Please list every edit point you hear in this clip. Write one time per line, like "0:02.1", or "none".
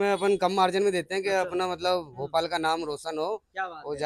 none